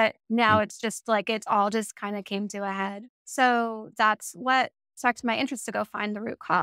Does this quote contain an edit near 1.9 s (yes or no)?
no